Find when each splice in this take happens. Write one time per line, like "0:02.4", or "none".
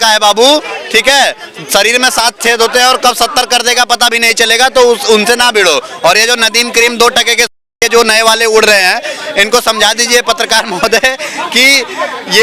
none